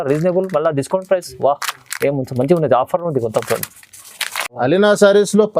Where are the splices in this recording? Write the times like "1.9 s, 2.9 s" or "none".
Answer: 4.6 s